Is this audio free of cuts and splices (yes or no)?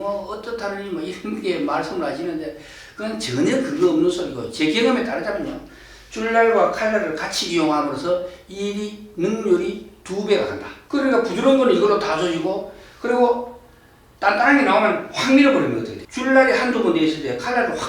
no